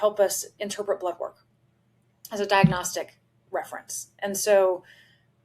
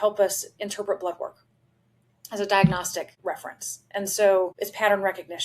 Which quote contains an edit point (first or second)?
second